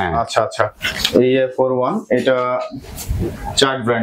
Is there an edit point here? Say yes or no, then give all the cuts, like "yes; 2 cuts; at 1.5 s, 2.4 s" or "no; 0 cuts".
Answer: no; 0 cuts